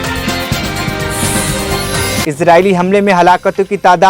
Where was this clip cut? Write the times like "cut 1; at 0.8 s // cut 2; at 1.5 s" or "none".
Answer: none